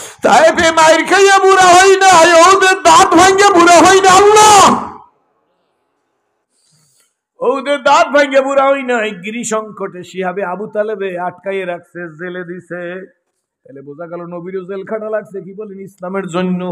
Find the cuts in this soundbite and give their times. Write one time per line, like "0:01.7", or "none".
none